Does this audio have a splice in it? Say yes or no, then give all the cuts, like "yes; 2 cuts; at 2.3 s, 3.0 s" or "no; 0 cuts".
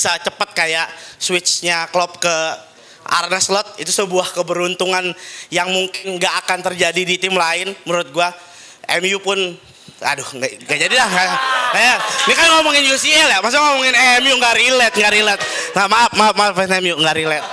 no; 0 cuts